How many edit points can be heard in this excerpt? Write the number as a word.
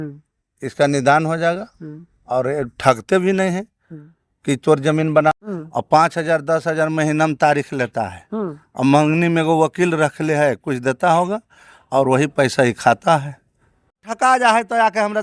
two